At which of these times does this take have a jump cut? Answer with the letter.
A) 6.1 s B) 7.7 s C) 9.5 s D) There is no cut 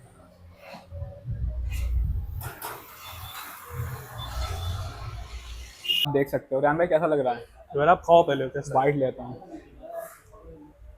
A